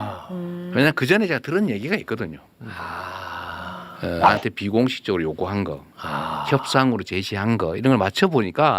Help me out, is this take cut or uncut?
cut